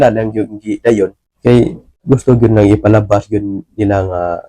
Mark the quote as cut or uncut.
cut